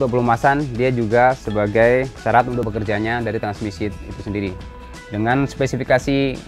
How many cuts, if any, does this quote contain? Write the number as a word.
two